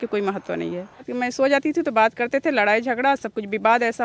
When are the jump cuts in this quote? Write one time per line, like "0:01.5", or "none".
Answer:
0:01.1